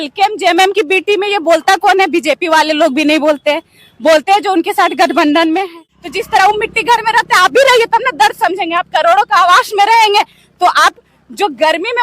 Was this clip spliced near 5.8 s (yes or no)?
yes